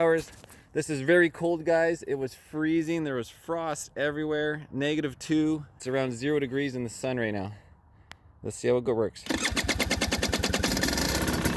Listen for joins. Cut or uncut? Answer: cut